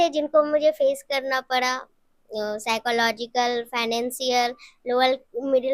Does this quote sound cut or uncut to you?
uncut